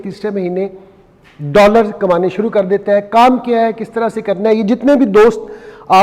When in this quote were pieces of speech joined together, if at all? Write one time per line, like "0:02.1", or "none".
none